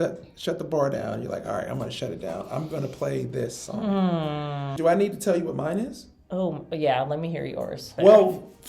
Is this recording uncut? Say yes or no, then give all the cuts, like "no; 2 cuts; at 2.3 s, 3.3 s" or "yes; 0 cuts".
no; 2 cuts; at 4.7 s, 7.9 s